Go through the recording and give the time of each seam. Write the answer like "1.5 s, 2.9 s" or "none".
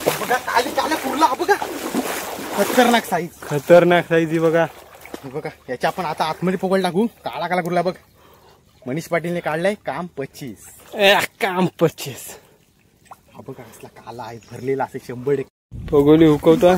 15.7 s